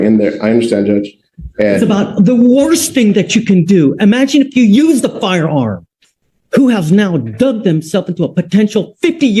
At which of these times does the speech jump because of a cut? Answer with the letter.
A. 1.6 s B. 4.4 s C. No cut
C